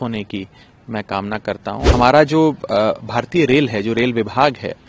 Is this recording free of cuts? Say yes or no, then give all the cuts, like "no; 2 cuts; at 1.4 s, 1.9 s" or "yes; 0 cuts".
no; 1 cut; at 1.8 s